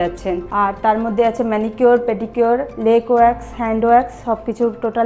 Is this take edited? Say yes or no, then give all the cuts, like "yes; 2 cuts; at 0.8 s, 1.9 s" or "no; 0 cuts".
no; 0 cuts